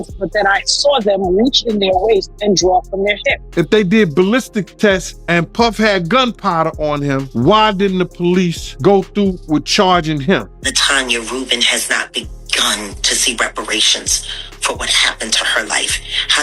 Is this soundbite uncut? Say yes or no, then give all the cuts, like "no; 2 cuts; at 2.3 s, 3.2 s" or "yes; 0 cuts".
no; 5 cuts; at 3.4 s, 5.1 s, 7.3 s, 8.7 s, 10.6 s